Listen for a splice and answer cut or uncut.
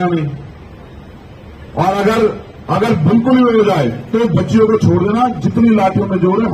uncut